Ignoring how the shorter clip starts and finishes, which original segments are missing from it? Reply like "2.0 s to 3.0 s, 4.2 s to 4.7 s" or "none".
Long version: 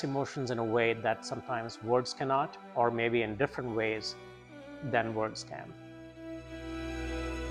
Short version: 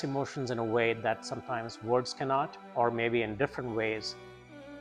none